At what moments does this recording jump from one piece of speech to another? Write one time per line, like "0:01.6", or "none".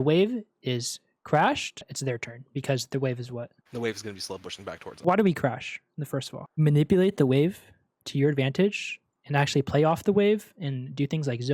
0:05.0
0:06.5